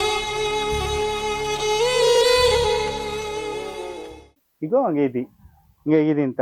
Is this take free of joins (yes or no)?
no